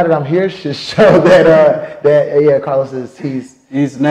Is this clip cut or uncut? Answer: uncut